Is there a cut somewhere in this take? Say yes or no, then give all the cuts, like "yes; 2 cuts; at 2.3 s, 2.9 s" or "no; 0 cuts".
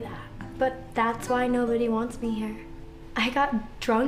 yes; 1 cut; at 1.9 s